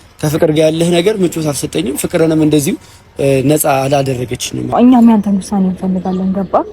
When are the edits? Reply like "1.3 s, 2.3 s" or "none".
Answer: 4.7 s